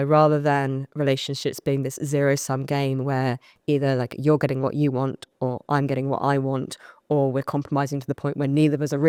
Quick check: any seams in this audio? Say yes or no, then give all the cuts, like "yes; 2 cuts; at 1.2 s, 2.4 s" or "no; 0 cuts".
no; 0 cuts